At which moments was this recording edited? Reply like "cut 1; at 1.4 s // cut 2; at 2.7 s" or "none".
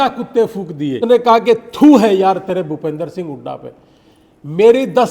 cut 1; at 1.0 s